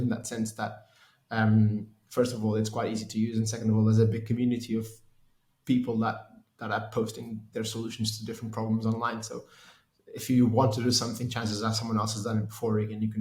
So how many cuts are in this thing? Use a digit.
0